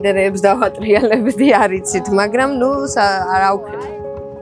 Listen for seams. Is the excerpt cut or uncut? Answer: uncut